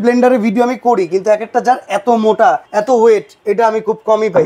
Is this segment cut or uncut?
cut